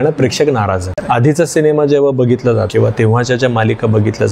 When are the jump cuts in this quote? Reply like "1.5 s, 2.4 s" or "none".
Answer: 2.7 s